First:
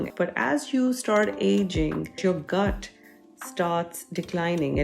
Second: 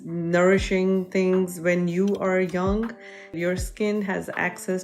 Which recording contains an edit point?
first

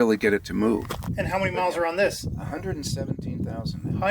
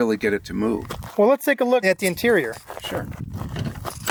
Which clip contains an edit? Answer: first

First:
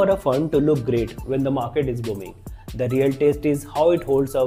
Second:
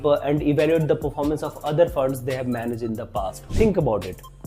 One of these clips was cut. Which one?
second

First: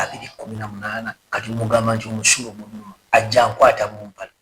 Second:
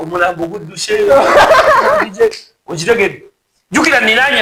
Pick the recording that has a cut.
first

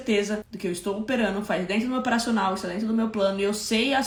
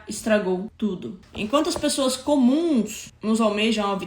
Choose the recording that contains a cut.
second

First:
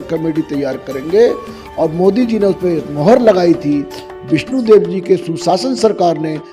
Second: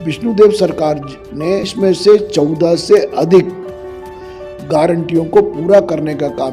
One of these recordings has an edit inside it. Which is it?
second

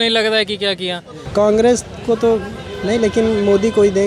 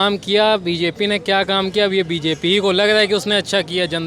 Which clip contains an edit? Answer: first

